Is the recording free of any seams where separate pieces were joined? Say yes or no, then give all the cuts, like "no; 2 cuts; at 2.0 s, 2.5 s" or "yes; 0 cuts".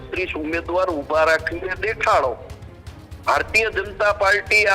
yes; 0 cuts